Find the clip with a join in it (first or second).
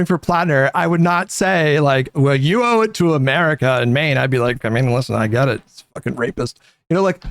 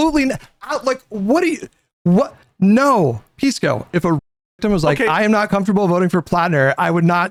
first